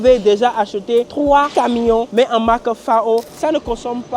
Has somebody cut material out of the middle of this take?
yes; 2 cuts; at 2.1 s, 3.2 s

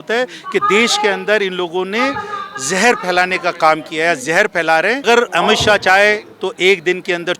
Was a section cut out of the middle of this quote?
yes; 1 cut; at 5.0 s

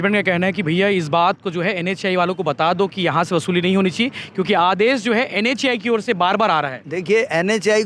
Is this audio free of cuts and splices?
yes; 0 cuts

